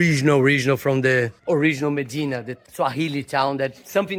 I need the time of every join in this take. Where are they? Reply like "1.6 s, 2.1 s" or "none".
none